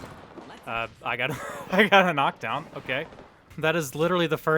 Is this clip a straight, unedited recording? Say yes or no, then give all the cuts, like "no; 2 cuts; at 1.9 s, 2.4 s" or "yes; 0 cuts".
no; 1 cut; at 3.5 s